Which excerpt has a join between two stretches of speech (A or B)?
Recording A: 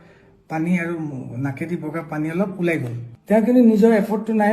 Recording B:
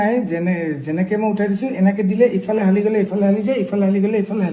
A